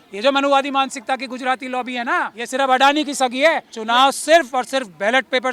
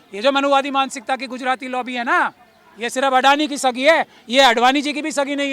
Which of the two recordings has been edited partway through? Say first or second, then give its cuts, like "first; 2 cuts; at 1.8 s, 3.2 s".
first; 2 cuts; at 2.4 s, 3.7 s